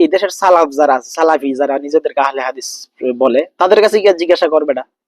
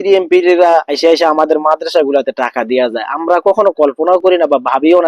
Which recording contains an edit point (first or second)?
second